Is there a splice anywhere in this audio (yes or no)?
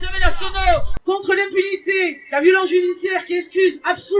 yes